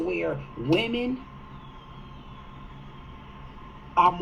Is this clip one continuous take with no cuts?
yes; 0 cuts

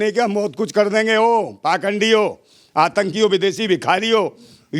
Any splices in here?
no; 0 cuts

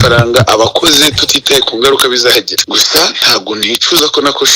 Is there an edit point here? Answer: yes; 1 cut; at 2.5 s

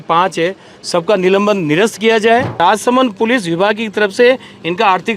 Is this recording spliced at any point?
yes; 1 cut; at 2.6 s

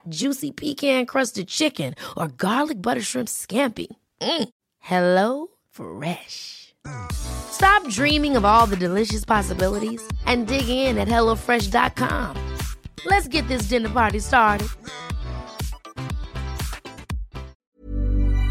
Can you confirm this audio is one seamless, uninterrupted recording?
no; 1 cut; at 17.6 s

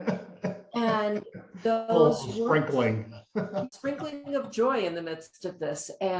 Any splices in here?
yes; 1 cut; at 3.7 s

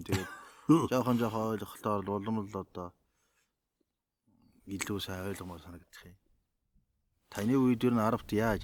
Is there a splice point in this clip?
no; 0 cuts

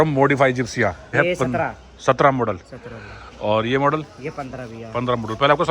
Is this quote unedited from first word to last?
no; 1 cut; at 1.1 s

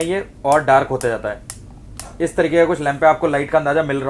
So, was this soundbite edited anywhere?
no; 0 cuts

